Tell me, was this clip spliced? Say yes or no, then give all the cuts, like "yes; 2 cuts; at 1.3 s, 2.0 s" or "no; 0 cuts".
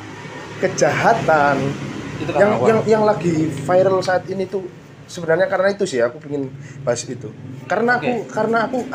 no; 0 cuts